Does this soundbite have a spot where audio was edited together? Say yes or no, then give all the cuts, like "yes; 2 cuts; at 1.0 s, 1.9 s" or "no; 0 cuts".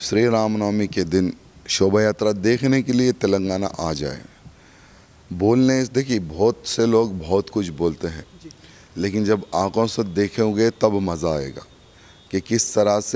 no; 0 cuts